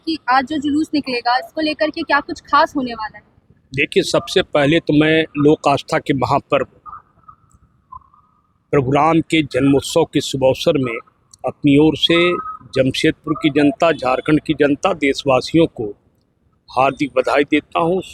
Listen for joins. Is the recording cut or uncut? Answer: uncut